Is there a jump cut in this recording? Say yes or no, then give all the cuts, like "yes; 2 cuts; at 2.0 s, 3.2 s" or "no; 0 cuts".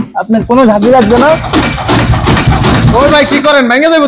no; 0 cuts